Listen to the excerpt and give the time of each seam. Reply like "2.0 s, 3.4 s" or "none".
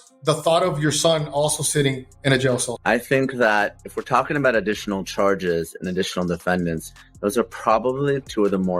2.7 s